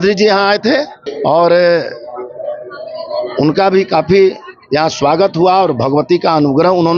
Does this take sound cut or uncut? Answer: cut